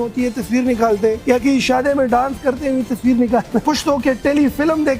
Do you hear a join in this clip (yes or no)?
yes